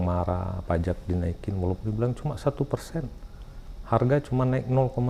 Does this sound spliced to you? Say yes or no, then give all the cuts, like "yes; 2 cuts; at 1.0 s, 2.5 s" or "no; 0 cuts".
no; 0 cuts